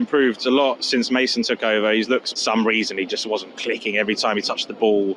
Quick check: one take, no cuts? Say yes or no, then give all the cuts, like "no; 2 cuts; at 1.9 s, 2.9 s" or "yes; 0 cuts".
no; 1 cut; at 2.3 s